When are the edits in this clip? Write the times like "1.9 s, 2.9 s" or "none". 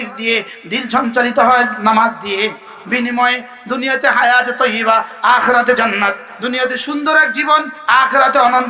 2.7 s, 6.3 s